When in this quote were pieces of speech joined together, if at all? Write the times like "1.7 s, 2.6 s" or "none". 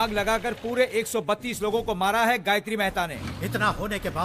3.1 s